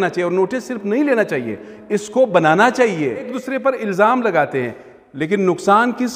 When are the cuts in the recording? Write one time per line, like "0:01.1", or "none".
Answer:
0:03.4

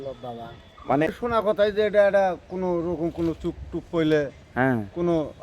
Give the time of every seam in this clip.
0:01.1

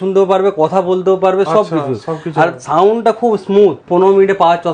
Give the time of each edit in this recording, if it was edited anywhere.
0:03.8

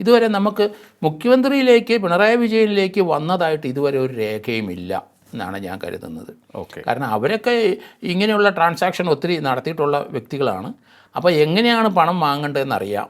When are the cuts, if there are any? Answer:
none

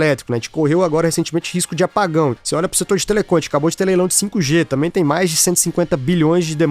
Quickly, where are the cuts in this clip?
0:02.4

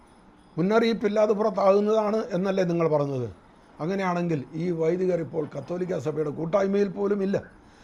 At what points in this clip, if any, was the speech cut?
none

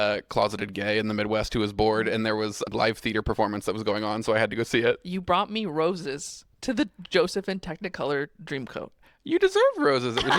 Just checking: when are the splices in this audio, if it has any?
0:02.7

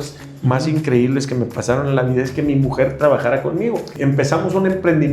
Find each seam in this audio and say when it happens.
0:03.9

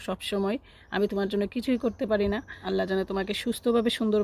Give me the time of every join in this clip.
0:02.5

